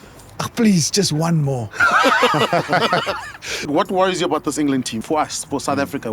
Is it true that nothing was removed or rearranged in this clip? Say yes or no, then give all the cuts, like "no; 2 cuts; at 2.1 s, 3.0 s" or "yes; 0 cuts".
no; 2 cuts; at 3.7 s, 5.0 s